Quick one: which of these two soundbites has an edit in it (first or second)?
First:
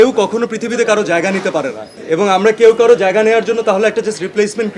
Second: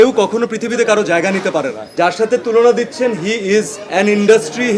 second